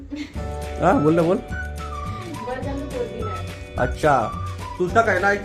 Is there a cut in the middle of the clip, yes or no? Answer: no